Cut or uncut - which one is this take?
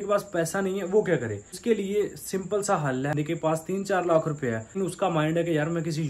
cut